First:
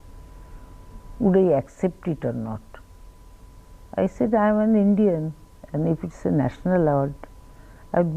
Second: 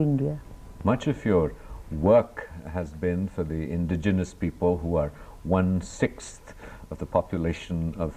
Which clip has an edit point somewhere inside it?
second; 1 cut; at 2.6 s

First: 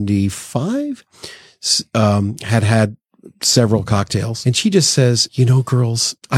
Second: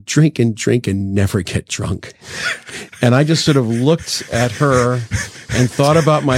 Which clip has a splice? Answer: first; 2 cuts; at 4.3 s, 5.3 s

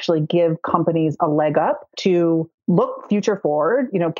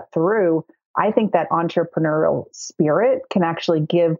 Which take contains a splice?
first; 2 cuts; at 1.9 s, 2.6 s

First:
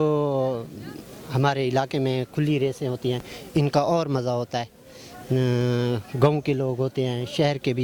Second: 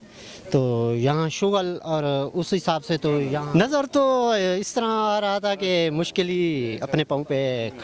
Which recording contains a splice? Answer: second; 1 cut; at 3.5 s

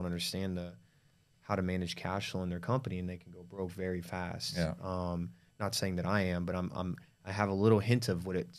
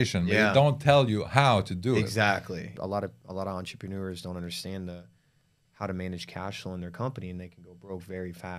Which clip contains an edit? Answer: second; 1 cut; at 2.7 s

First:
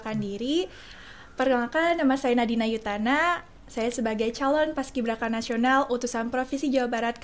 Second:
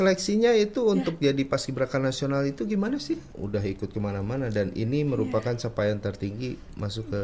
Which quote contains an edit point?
second; 1 cut; at 3.3 s

